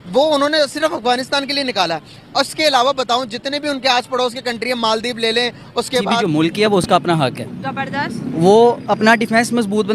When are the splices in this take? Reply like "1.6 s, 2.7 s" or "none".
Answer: 6.2 s